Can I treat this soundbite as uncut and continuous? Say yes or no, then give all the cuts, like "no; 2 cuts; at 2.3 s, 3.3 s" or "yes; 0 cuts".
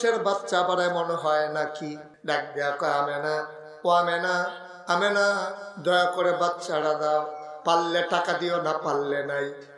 no; 1 cut; at 2.1 s